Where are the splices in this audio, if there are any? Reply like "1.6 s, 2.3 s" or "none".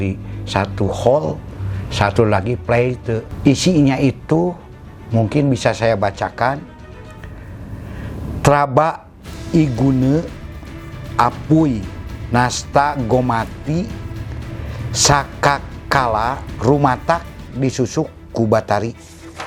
none